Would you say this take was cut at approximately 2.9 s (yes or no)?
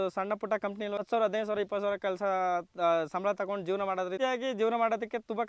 no